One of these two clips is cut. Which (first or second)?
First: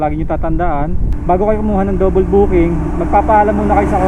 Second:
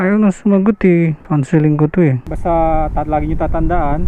second